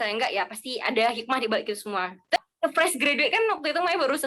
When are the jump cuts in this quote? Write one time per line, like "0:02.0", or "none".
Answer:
0:02.4

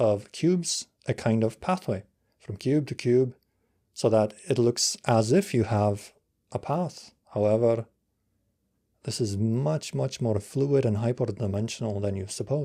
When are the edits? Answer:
none

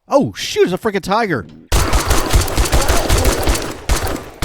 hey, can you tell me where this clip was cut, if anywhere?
0:01.6

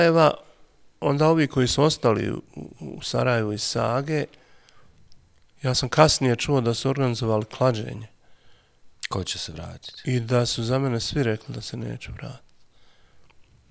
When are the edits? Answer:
none

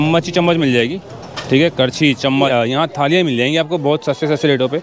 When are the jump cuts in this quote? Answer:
0:02.5

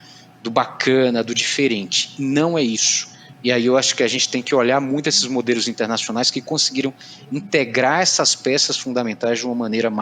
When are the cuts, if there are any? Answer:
none

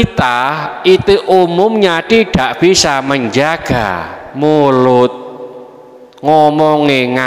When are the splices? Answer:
none

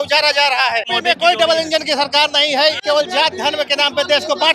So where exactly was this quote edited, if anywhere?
0:00.9
0:02.8

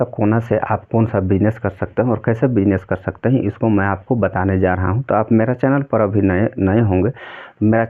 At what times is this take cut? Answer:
none

